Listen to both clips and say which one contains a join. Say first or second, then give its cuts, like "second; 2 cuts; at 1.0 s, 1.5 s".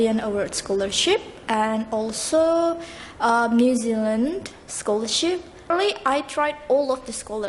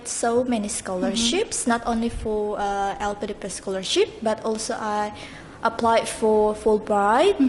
first; 1 cut; at 5.7 s